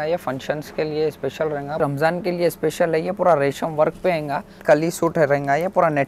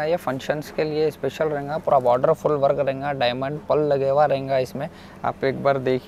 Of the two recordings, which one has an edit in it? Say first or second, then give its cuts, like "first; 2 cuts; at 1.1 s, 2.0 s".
first; 2 cuts; at 1.8 s, 4.6 s